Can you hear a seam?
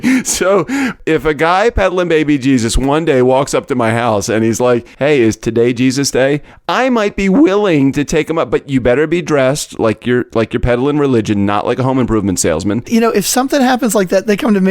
yes; 3 cuts; at 1.0 s, 4.9 s, 12.8 s

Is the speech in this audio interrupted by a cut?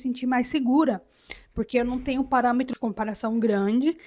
yes; 1 cut; at 2.7 s

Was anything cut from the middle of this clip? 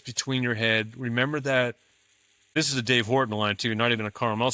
yes; 1 cut; at 2.5 s

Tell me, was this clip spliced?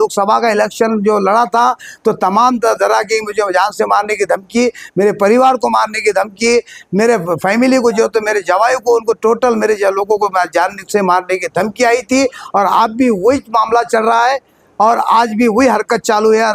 no; 0 cuts

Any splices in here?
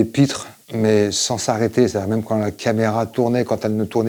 no; 0 cuts

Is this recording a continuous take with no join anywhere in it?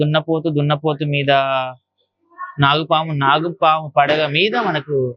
yes; 0 cuts

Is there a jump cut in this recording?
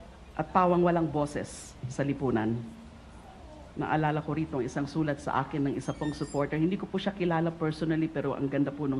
no; 0 cuts

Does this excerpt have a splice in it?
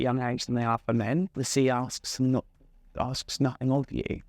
yes; 1 cut; at 1.3 s

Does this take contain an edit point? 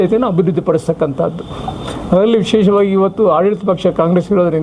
no; 0 cuts

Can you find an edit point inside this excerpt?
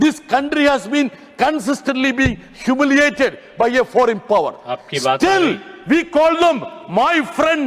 no; 0 cuts

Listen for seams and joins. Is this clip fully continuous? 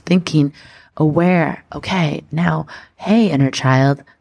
yes; 0 cuts

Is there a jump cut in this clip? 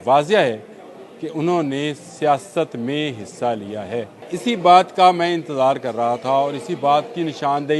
yes; 1 cut; at 4.2 s

